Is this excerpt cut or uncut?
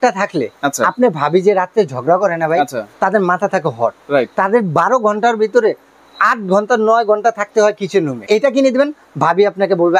cut